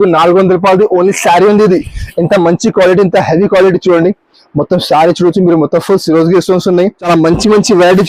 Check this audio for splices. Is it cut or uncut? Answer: cut